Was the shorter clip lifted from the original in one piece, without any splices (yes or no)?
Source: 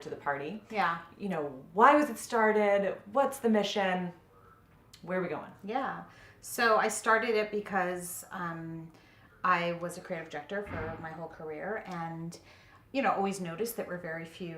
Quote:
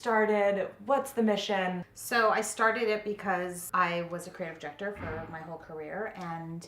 no